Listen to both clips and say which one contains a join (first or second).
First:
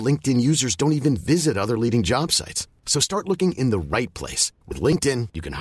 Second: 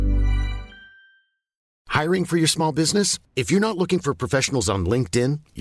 second